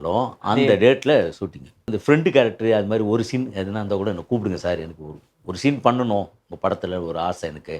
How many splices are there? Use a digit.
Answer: 1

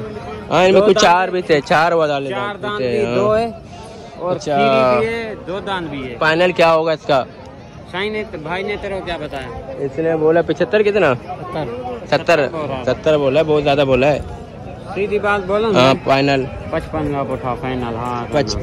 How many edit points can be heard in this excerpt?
0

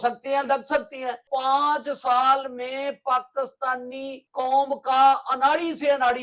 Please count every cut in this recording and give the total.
2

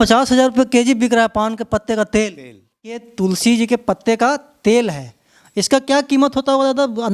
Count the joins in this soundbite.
1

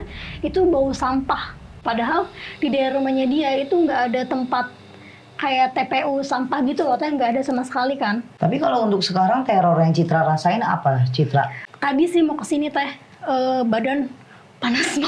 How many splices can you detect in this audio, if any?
3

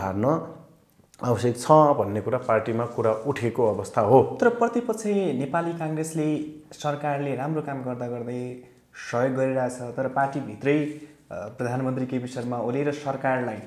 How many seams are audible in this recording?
0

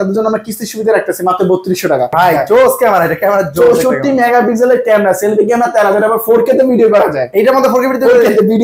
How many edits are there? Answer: 1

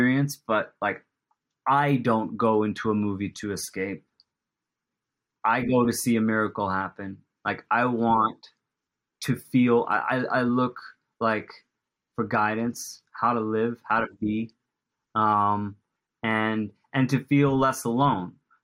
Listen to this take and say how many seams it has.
0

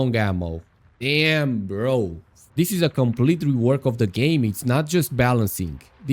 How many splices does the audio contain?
1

